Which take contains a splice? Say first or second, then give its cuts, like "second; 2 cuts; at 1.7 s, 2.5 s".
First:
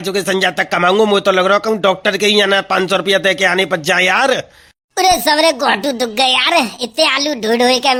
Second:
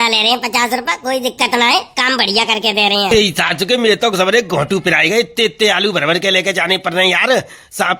second; 1 cut; at 3.1 s